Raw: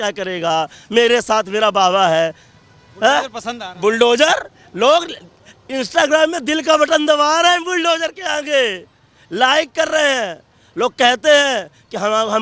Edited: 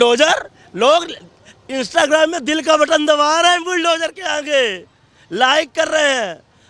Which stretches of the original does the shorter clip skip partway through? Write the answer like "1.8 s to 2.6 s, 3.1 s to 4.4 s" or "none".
none